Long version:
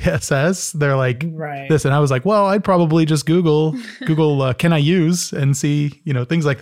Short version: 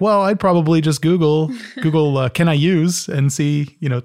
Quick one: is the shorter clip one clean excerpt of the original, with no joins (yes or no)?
yes